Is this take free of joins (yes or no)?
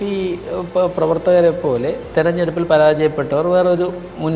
yes